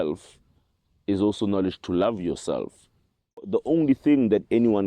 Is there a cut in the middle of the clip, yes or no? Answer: yes